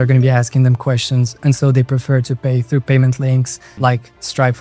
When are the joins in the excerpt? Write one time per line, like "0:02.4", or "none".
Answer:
0:03.6